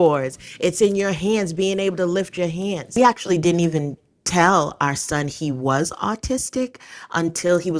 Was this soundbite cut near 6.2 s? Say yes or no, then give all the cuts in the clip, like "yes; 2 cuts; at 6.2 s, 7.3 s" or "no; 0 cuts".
no; 1 cut; at 3.0 s